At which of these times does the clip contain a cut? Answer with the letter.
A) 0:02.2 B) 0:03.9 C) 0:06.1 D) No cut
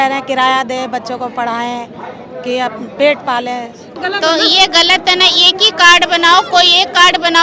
B